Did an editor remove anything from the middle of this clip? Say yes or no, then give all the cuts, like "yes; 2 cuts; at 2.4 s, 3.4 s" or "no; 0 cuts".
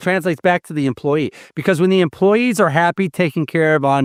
no; 0 cuts